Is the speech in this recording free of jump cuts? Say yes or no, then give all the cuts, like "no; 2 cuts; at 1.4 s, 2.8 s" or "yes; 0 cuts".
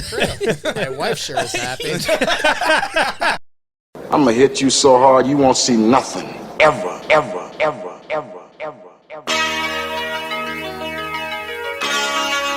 no; 1 cut; at 3.4 s